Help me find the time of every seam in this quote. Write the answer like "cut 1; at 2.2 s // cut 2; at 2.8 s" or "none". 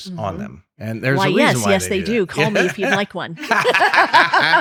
none